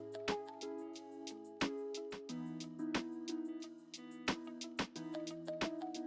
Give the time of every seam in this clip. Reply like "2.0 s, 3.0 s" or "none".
none